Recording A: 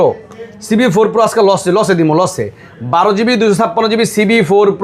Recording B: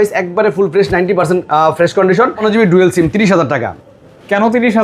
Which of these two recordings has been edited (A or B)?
B